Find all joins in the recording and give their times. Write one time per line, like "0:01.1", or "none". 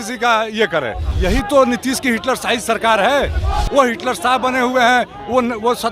0:01.1